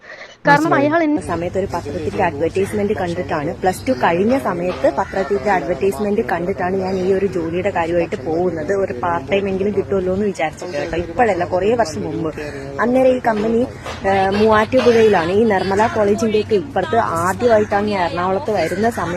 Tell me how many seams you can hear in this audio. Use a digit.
1